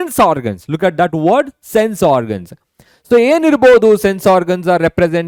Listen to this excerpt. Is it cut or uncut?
uncut